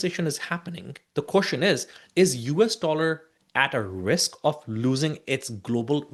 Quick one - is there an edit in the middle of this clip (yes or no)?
no